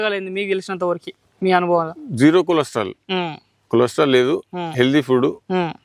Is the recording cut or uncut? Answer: uncut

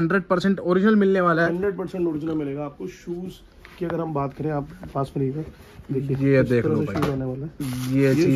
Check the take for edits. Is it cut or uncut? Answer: uncut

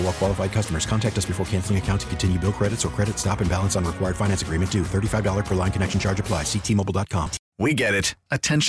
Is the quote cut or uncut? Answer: cut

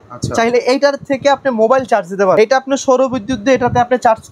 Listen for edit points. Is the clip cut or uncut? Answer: cut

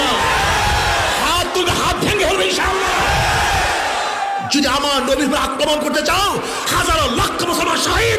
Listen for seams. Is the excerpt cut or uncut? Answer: uncut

